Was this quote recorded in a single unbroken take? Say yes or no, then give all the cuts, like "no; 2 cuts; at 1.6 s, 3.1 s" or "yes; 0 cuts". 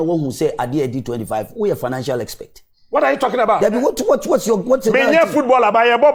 yes; 0 cuts